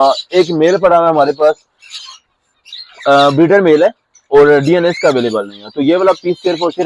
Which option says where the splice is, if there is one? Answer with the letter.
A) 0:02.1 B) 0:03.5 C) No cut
C